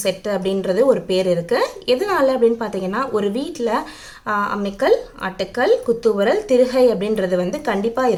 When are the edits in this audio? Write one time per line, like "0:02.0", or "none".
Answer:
none